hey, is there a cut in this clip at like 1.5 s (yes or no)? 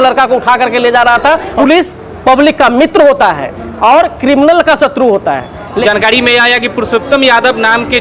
yes